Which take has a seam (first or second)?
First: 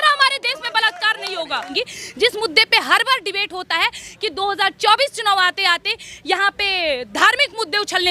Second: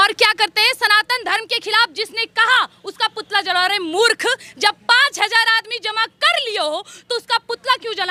first